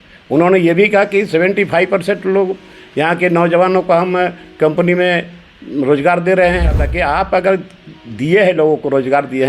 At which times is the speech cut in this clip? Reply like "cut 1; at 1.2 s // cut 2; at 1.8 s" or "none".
cut 1; at 6.9 s